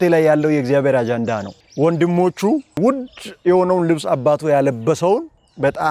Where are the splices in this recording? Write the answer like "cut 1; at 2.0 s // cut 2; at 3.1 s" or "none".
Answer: cut 1; at 1.6 s